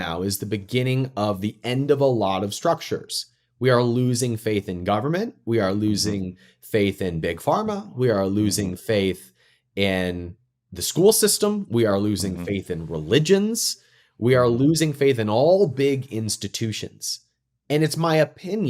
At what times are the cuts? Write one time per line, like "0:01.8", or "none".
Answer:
none